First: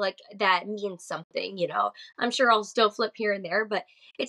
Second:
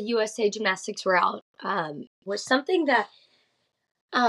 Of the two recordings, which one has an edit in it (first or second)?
second